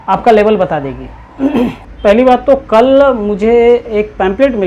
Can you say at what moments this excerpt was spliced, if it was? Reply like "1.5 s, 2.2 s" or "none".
1.8 s